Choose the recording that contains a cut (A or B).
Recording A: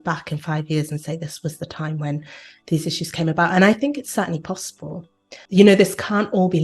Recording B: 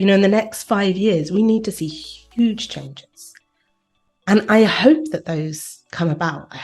A